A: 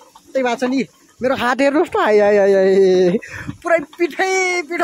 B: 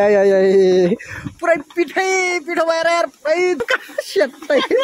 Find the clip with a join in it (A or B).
B